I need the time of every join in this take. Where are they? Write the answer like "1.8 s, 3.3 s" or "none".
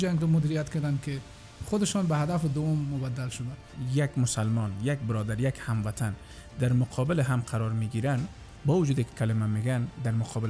3.7 s, 8.5 s